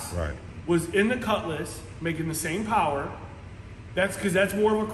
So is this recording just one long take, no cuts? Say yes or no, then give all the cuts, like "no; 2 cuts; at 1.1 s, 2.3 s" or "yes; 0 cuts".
yes; 0 cuts